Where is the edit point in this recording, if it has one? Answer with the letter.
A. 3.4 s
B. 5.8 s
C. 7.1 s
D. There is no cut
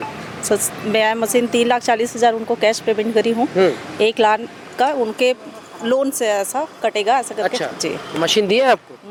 D